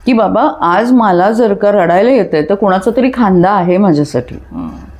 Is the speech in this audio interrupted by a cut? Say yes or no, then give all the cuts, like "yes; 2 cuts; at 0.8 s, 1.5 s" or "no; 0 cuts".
no; 0 cuts